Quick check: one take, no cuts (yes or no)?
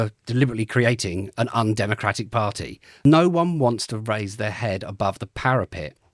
no